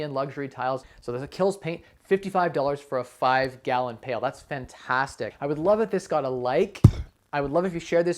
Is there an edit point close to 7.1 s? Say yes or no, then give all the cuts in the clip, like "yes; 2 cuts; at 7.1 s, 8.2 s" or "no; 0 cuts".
no; 2 cuts; at 0.9 s, 5.3 s